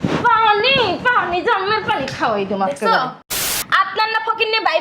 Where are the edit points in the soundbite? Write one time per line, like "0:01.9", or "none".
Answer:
0:03.6